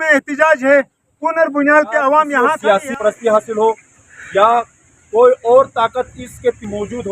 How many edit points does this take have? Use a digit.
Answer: 1